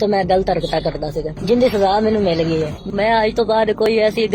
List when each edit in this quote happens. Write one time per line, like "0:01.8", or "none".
0:02.8